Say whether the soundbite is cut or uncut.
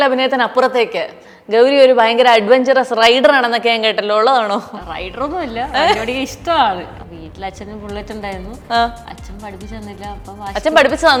uncut